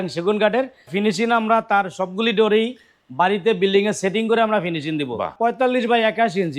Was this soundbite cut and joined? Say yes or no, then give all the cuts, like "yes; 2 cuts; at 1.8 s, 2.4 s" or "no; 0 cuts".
yes; 2 cuts; at 0.9 s, 5.3 s